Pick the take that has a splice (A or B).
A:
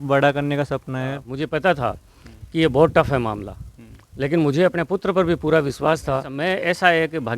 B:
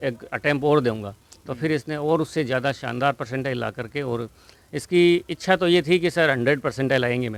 A